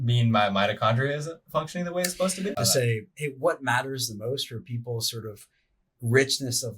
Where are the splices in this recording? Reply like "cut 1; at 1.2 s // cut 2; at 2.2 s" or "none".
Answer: cut 1; at 2.5 s